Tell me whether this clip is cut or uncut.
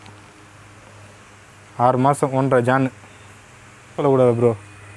cut